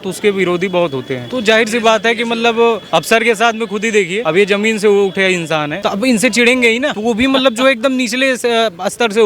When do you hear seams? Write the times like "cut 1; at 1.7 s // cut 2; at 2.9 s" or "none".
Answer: cut 1; at 1.2 s // cut 2; at 2.8 s // cut 3; at 4.2 s // cut 4; at 5.7 s // cut 5; at 6.9 s